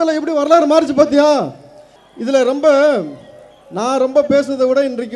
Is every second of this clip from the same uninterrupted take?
yes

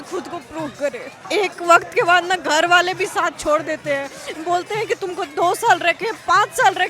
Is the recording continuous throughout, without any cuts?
no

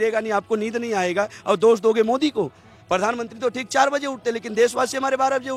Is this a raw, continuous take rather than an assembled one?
yes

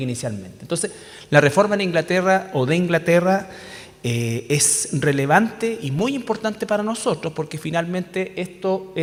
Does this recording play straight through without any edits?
yes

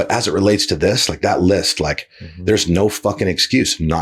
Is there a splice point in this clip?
no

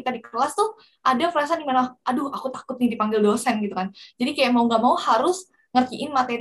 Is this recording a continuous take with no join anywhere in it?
yes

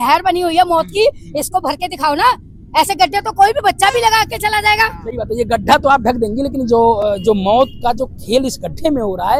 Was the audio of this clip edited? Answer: no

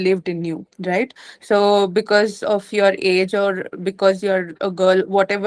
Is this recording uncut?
yes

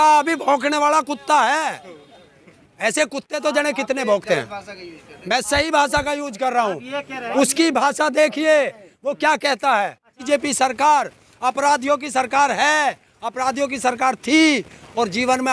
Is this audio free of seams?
no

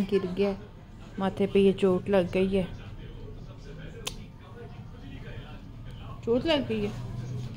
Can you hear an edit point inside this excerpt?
no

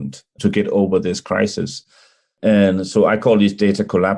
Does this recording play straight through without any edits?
yes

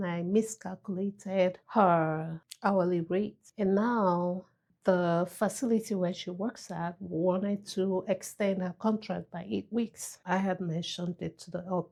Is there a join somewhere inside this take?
no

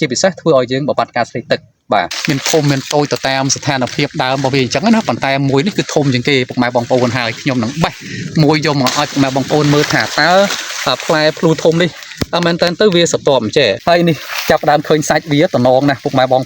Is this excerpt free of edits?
no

